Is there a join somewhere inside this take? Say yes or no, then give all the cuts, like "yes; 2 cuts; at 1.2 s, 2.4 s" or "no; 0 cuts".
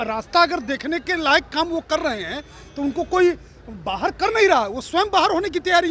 no; 0 cuts